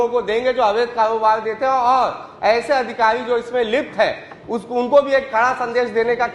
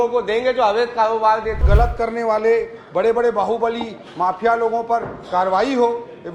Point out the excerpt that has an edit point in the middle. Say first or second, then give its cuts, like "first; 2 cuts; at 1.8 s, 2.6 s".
second; 1 cut; at 1.6 s